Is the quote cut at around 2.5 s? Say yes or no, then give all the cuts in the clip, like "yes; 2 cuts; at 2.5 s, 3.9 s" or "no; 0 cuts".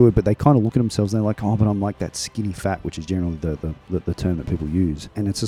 no; 0 cuts